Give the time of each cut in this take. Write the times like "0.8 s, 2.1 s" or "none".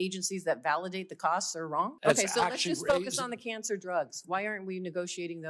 1.9 s